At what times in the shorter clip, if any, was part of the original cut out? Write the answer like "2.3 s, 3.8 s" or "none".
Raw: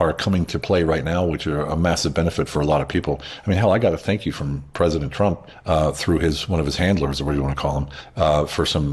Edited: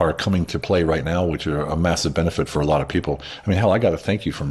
none